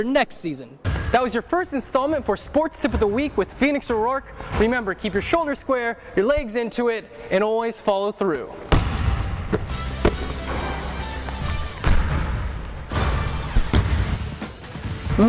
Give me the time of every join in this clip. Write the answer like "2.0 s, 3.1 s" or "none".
1.0 s